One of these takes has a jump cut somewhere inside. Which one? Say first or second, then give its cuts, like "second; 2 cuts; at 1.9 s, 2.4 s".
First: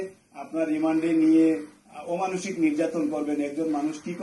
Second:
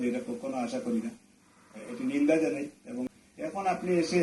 second; 1 cut; at 3.1 s